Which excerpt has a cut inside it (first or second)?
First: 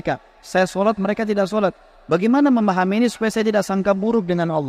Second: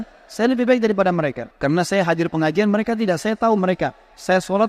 second